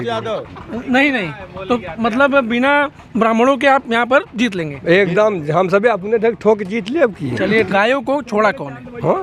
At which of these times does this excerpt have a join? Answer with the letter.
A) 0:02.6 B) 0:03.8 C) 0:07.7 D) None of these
C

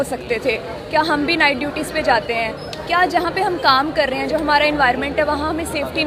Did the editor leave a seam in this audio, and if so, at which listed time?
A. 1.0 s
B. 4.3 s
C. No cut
C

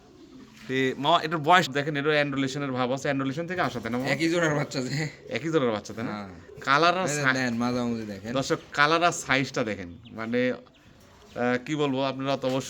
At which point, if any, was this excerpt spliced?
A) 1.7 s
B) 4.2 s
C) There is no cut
A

